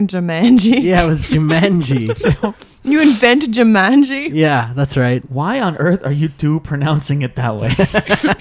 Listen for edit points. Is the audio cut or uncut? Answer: uncut